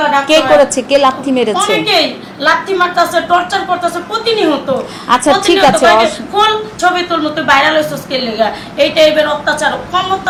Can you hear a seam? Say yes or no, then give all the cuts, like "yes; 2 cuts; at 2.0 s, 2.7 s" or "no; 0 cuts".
no; 0 cuts